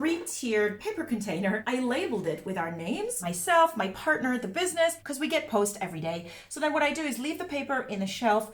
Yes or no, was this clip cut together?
no